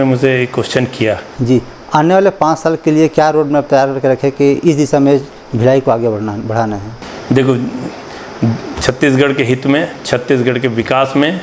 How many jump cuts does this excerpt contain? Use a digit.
1